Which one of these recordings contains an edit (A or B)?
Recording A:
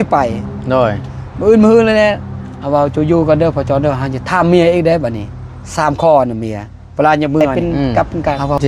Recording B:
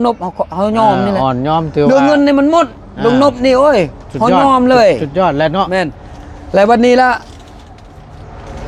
A